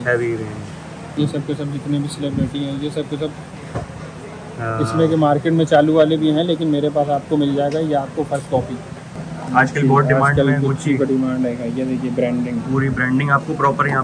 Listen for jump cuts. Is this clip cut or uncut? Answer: cut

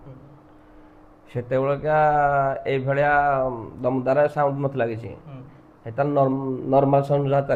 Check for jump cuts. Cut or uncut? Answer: uncut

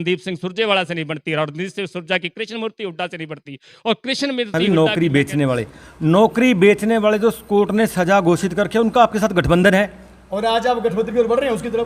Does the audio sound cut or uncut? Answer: cut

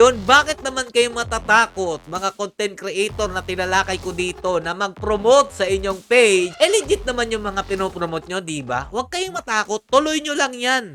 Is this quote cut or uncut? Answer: uncut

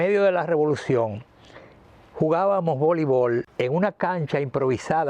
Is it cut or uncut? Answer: cut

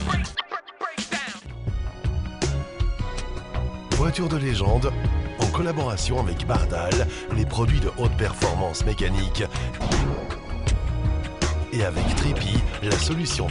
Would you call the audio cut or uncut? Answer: cut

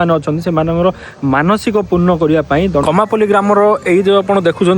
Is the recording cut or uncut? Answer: cut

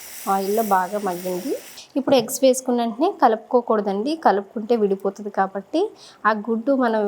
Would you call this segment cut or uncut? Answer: cut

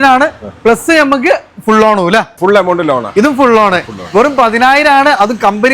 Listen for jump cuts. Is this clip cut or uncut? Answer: cut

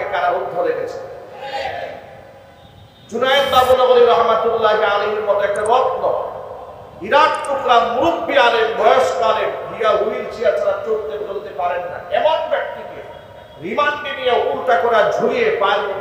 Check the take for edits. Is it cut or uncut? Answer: uncut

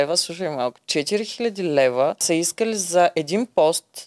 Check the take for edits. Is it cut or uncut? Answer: cut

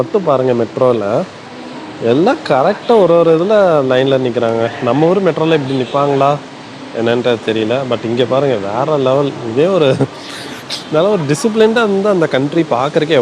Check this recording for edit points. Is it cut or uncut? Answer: uncut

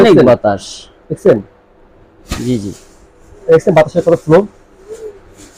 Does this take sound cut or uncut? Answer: uncut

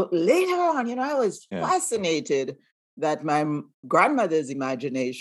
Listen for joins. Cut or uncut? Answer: uncut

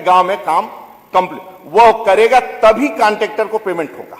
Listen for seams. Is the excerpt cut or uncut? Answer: uncut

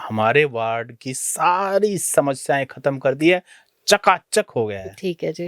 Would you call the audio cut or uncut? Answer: uncut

